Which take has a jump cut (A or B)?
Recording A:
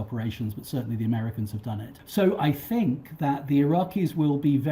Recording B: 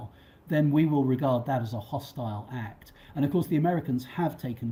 A